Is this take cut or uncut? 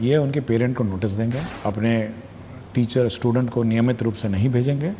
cut